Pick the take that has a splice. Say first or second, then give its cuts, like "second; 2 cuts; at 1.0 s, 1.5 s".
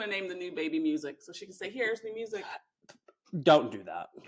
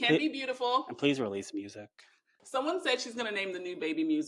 second; 1 cut; at 2.3 s